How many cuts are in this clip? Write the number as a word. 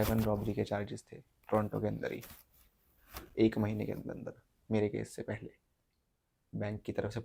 one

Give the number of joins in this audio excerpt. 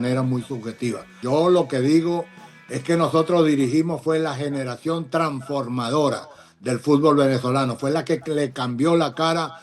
one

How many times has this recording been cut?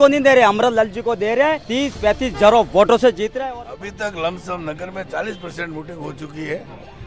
two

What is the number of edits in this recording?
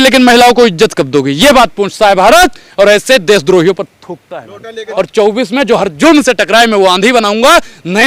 one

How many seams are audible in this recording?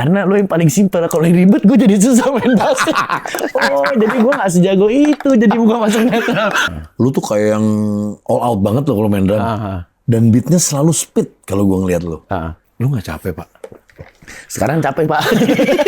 two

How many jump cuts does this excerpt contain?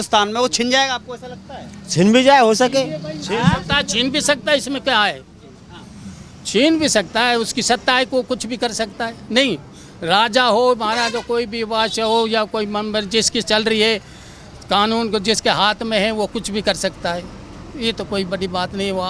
zero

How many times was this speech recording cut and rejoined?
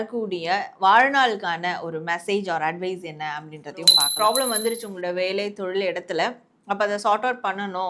one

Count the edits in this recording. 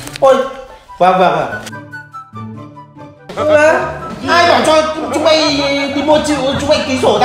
zero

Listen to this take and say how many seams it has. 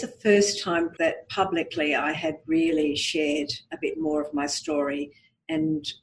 one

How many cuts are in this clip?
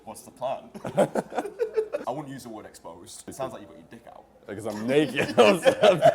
two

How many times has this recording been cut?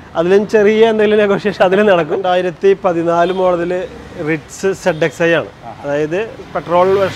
one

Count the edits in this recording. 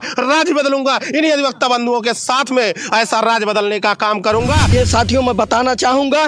one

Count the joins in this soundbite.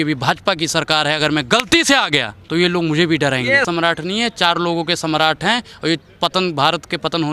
two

